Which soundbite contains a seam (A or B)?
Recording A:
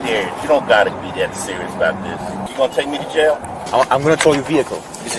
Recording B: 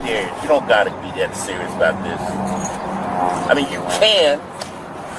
A